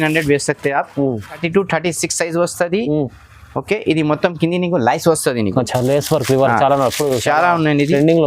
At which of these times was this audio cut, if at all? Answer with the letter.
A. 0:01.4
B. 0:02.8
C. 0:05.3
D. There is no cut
A